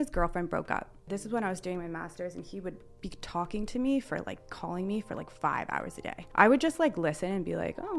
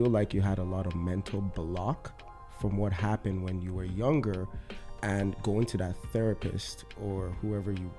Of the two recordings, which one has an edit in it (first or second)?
first